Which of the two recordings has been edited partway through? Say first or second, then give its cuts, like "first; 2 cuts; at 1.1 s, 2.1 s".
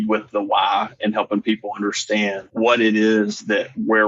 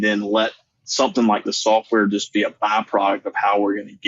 first; 1 cut; at 2.4 s